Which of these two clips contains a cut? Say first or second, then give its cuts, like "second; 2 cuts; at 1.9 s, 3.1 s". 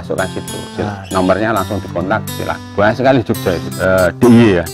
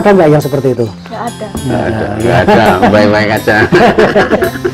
first; 2 cuts; at 2.6 s, 3.7 s